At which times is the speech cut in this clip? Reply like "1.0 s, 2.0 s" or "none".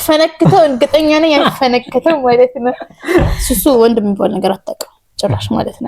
3.4 s